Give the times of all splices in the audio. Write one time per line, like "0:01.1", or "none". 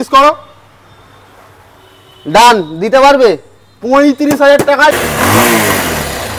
0:05.0

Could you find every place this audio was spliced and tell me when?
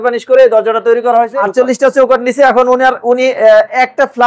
0:01.4

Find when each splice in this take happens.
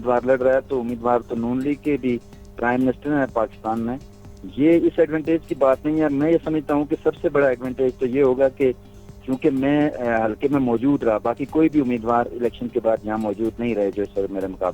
none

